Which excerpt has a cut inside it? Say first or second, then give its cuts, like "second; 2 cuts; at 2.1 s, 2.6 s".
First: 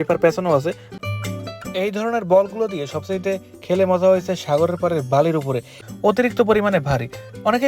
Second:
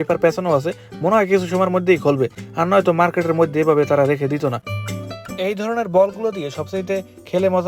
first; 2 cuts; at 0.9 s, 5.8 s